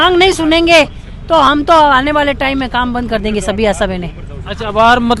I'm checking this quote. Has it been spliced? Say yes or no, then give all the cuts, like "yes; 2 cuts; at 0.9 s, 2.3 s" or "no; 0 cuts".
no; 0 cuts